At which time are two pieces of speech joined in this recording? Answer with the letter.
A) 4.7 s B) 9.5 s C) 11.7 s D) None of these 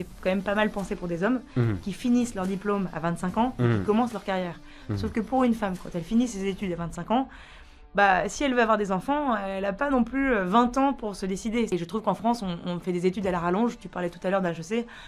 C